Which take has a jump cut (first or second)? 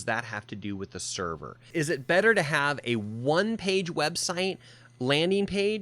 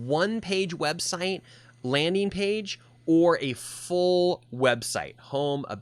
first